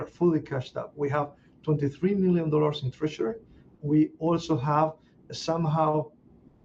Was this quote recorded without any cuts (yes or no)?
yes